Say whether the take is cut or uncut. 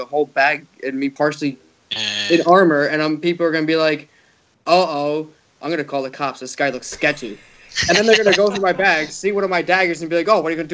cut